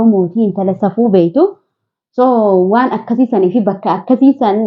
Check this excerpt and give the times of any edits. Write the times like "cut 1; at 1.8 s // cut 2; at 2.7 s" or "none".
none